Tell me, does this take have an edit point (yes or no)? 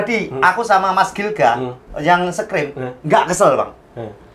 no